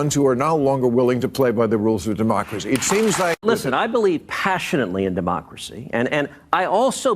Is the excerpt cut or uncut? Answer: cut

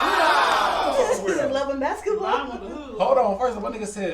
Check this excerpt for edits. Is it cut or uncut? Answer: cut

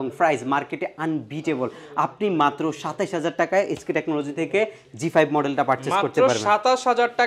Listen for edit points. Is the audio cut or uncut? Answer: uncut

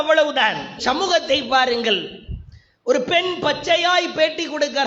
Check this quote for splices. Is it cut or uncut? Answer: uncut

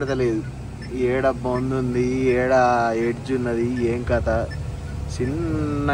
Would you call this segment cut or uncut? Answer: uncut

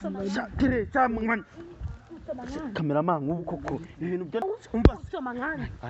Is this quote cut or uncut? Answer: cut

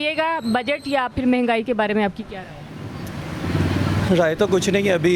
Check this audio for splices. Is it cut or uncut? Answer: uncut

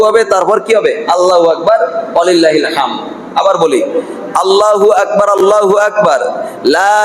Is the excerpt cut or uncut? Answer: uncut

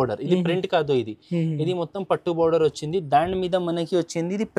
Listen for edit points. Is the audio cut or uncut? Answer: uncut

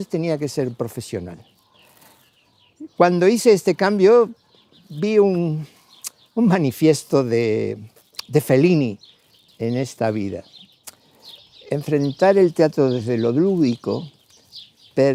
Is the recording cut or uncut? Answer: uncut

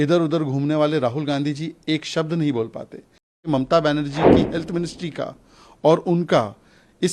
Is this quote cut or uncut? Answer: cut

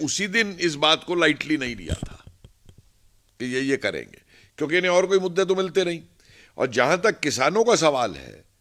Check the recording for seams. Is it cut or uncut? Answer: uncut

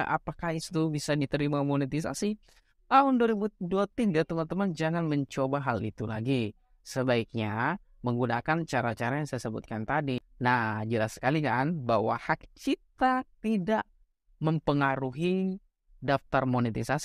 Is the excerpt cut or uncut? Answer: cut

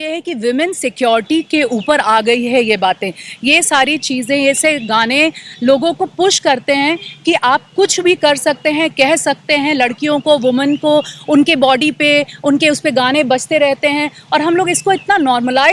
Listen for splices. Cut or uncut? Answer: uncut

